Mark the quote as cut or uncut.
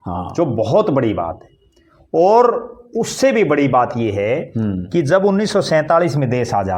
uncut